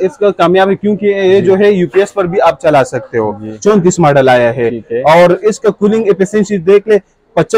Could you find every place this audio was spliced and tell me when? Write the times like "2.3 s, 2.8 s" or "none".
3.5 s